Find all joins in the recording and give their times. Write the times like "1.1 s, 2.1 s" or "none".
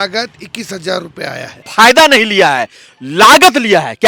1.7 s